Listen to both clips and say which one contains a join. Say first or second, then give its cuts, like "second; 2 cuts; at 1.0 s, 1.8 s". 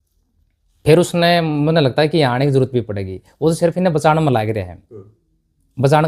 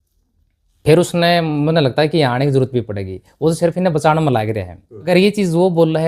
second; 1 cut; at 5.1 s